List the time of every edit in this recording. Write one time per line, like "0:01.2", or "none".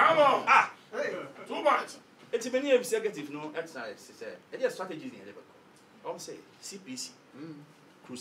none